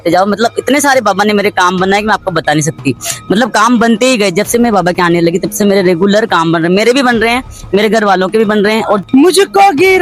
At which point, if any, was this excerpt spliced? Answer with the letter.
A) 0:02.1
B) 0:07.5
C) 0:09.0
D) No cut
C